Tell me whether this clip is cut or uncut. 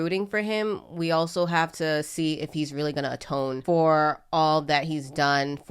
cut